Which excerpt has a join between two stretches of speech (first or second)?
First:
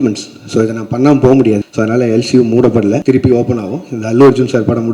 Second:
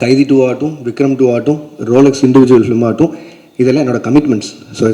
first